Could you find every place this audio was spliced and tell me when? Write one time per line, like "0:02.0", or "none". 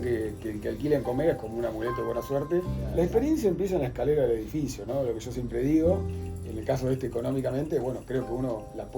0:02.8
0:06.2